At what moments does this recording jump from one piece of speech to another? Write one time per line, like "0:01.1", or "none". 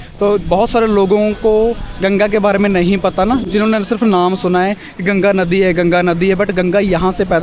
none